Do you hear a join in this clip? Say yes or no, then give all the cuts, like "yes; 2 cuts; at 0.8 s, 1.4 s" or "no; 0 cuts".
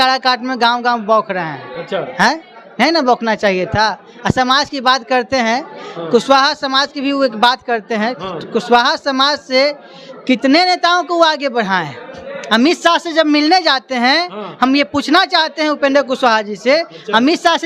no; 0 cuts